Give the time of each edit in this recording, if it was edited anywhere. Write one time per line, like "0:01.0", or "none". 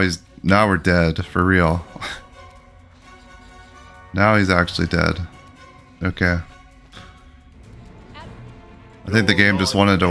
0:07.9